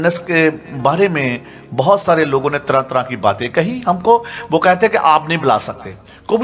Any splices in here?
no; 0 cuts

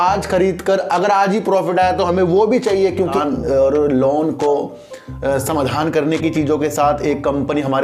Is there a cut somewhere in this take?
yes; 1 cut; at 3.1 s

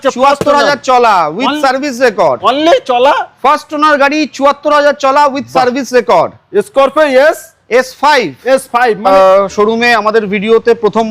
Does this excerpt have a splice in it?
yes; 1 cut; at 9.1 s

